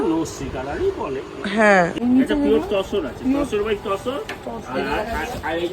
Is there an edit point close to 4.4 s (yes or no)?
no